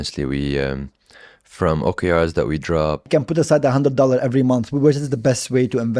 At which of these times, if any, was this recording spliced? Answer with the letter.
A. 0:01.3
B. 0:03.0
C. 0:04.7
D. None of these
B